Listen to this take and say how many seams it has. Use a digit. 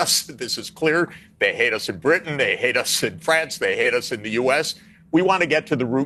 0